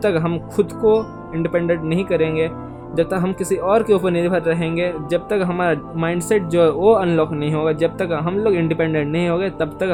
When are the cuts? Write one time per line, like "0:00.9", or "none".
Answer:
none